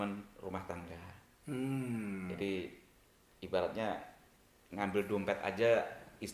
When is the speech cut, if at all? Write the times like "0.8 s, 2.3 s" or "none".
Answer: none

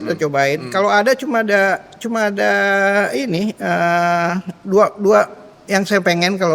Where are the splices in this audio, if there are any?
none

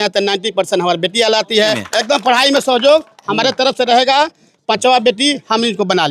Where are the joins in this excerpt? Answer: 1.8 s

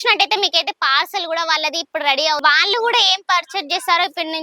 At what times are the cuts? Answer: 2.4 s

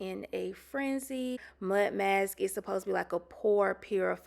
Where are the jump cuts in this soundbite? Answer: 1.5 s

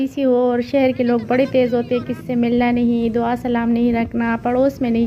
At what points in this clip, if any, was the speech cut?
none

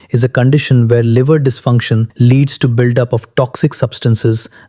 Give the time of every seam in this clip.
2.1 s

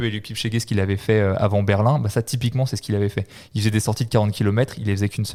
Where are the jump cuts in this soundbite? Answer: none

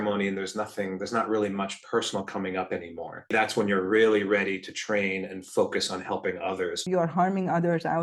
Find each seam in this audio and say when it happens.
3.3 s, 6.8 s

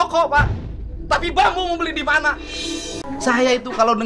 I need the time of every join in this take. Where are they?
2.9 s

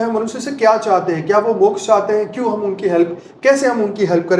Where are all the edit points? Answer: none

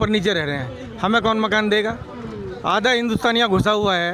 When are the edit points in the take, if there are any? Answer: none

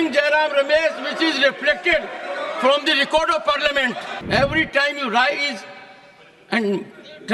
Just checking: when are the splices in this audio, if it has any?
4.1 s

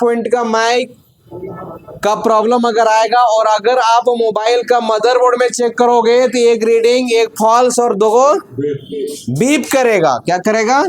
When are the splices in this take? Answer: none

